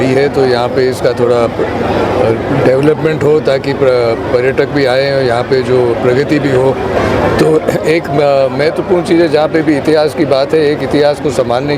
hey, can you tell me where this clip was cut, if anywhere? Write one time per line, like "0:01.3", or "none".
none